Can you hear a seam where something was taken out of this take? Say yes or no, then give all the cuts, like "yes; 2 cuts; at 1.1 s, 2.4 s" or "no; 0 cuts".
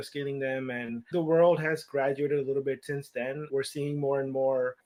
no; 0 cuts